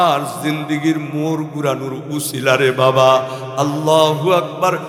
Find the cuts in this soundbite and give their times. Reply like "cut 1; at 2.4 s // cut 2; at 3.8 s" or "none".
none